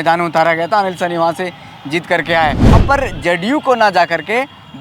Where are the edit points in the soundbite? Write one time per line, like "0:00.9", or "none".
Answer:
0:02.7